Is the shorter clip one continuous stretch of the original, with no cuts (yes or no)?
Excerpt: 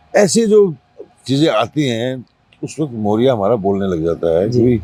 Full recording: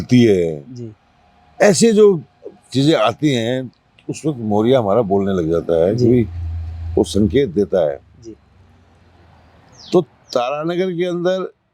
yes